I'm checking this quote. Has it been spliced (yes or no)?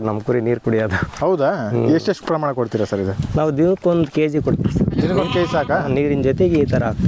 no